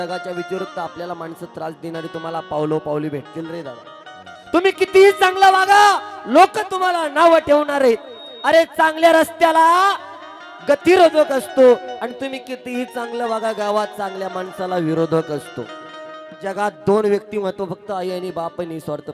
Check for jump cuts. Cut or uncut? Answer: uncut